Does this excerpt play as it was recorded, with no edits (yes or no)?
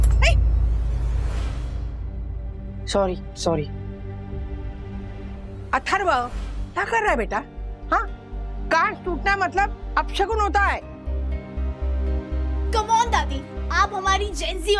yes